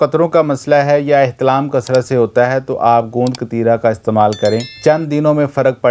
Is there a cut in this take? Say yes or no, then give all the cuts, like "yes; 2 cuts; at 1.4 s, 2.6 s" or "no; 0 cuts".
yes; 1 cut; at 4.7 s